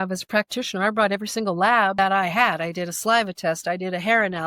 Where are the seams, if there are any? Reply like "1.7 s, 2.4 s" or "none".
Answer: 2.0 s